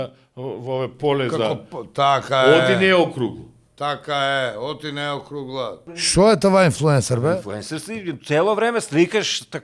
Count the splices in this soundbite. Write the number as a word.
one